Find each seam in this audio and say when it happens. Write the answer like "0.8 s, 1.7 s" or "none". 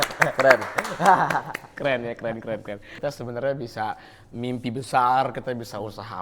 2.9 s